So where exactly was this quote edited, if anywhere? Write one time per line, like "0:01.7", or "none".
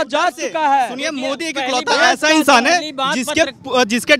none